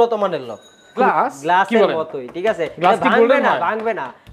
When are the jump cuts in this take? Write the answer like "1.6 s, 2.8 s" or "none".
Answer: 0.9 s